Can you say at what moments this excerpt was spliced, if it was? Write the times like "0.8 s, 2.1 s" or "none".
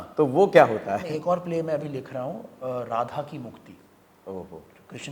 1.1 s